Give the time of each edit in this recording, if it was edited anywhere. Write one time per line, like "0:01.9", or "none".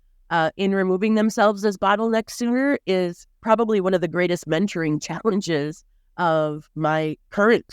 0:03.3
0:06.7